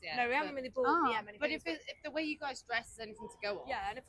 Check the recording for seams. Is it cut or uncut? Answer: uncut